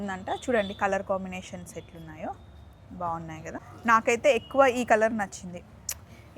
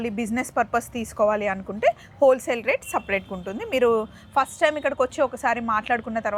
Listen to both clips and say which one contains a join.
first; 1 cut; at 3.7 s

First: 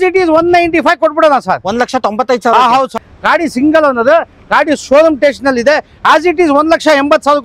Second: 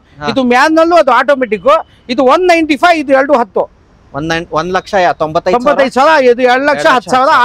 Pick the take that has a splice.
first; 1 cut; at 2.9 s

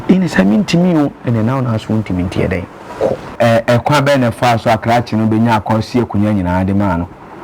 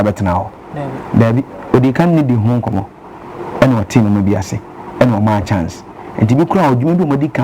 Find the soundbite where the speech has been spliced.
first; 1 cut; at 3.4 s

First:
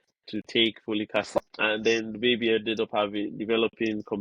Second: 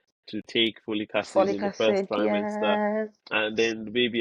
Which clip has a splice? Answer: first; 1 cut; at 1.4 s

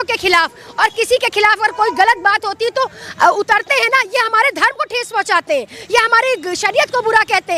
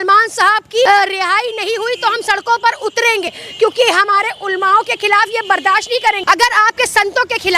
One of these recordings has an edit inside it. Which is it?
second; 3 cuts; at 0.9 s, 3.2 s, 6.2 s

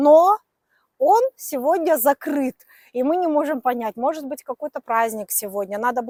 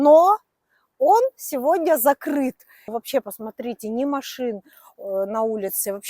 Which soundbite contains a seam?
second; 1 cut; at 2.9 s

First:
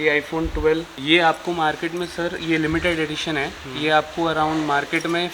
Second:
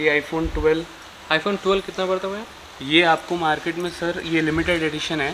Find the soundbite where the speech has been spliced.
first; 1 cut; at 0.9 s

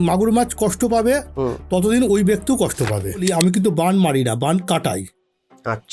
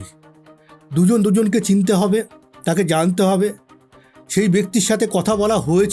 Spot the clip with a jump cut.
first; 1 cut; at 3.2 s

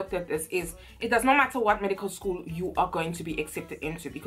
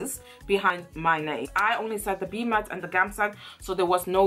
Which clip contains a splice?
second; 1 cut; at 1.1 s

